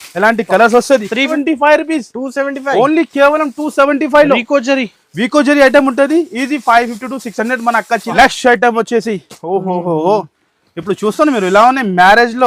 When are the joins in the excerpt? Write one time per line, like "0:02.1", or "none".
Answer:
0:01.3
0:08.1